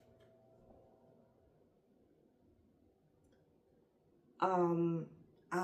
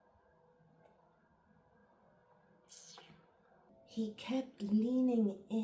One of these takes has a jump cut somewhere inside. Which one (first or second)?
second